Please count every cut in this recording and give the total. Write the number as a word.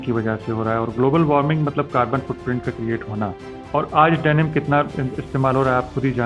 one